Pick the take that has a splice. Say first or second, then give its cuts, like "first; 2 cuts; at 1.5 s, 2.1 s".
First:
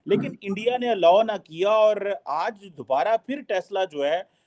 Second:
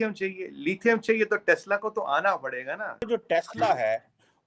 second; 1 cut; at 3.0 s